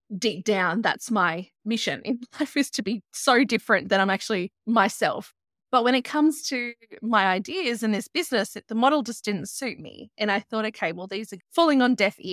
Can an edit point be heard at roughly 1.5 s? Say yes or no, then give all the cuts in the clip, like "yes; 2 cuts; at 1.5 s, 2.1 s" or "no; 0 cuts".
yes; 4 cuts; at 1.5 s, 4.5 s, 5.3 s, 11.3 s